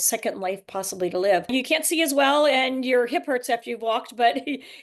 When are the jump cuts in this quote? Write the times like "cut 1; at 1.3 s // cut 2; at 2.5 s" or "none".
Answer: cut 1; at 1.5 s

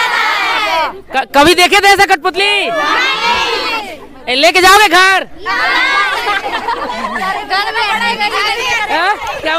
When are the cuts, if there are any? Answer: none

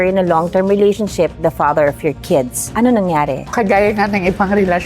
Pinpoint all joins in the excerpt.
cut 1; at 2.6 s // cut 2; at 3.5 s

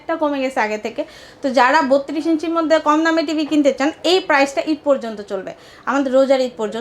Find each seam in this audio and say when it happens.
none

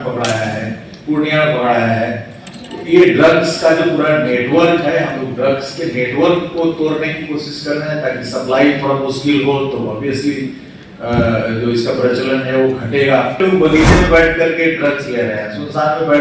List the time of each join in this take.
cut 1; at 13.4 s

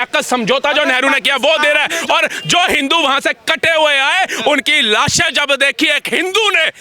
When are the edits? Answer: none

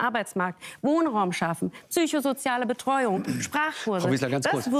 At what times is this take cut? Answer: none

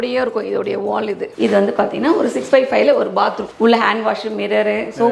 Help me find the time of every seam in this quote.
cut 1; at 1.3 s // cut 2; at 3.5 s

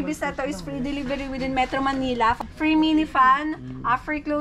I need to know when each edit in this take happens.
cut 1; at 2.3 s

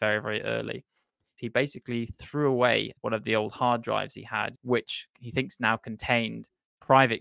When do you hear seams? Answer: cut 1; at 1.4 s // cut 2; at 2.9 s // cut 3; at 4.6 s

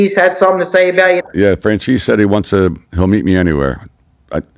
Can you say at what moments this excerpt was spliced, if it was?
cut 1; at 1.2 s

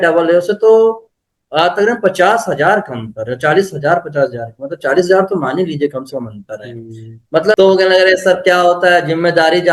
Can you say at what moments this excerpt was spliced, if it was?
cut 1; at 7.5 s

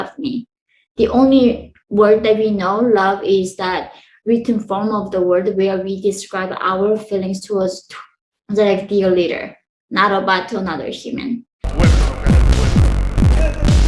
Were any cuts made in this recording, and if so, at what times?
cut 1; at 11.6 s

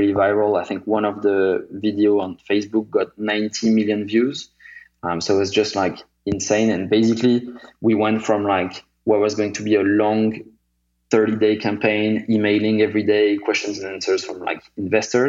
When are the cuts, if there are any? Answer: none

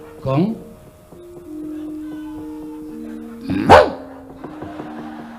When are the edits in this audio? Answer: none

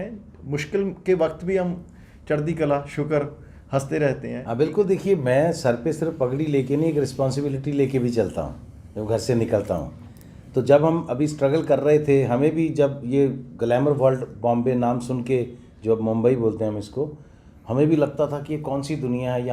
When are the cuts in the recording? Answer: cut 1; at 4.5 s

